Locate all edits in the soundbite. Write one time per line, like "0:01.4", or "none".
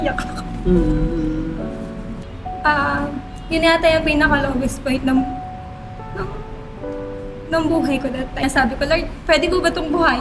0:02.2
0:08.4